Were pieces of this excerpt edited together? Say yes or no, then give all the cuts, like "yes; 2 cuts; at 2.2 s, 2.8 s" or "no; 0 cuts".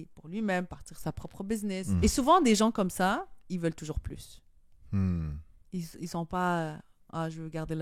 yes; 1 cut; at 2.0 s